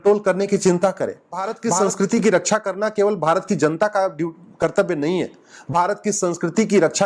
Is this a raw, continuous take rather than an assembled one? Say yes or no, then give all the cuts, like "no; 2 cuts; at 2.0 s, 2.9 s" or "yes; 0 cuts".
no; 1 cut; at 1.5 s